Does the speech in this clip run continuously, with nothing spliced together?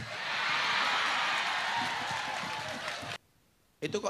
no; 1 cut; at 3.2 s

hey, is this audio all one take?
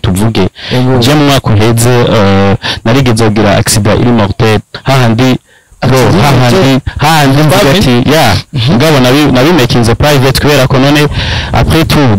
yes; 0 cuts

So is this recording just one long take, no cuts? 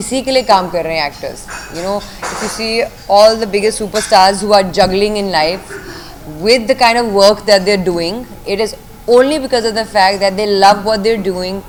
yes; 0 cuts

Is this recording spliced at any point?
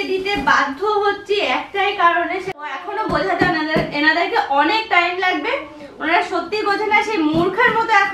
yes; 1 cut; at 2.7 s

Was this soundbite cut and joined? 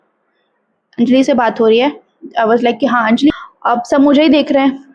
yes; 1 cut; at 3.3 s

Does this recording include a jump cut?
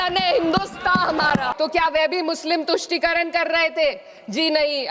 yes; 1 cut; at 1.5 s

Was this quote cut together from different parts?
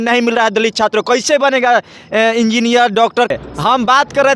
yes; 1 cut; at 3.3 s

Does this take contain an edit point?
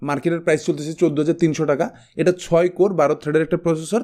no; 0 cuts

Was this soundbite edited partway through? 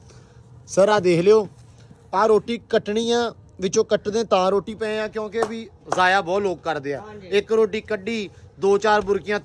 no; 0 cuts

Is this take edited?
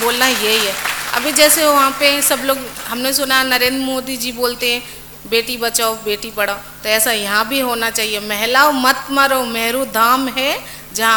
no; 0 cuts

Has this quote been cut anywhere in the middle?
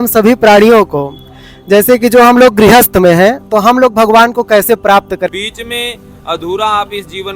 yes; 1 cut; at 5.3 s

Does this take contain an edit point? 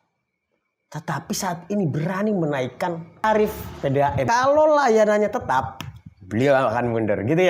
yes; 2 cuts; at 3.2 s, 4.2 s

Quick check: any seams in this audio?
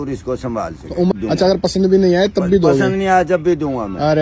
yes; 1 cut; at 1.1 s

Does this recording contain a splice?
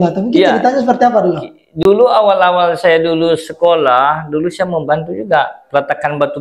no; 0 cuts

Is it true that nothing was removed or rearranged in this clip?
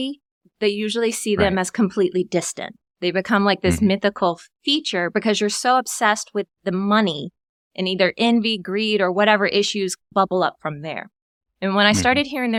yes; 0 cuts

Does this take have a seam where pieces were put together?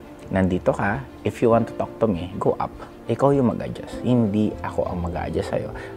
no; 0 cuts

